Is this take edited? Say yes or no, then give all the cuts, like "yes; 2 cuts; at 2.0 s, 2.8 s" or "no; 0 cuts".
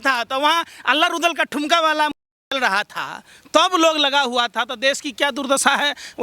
no; 0 cuts